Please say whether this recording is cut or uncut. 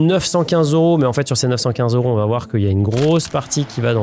uncut